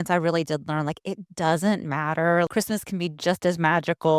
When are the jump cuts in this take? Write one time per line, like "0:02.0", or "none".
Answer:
0:02.5